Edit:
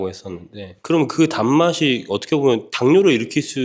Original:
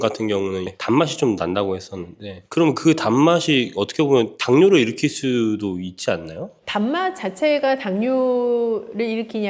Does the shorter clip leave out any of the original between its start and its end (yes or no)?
no